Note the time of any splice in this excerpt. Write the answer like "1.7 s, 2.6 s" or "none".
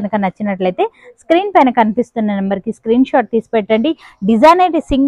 none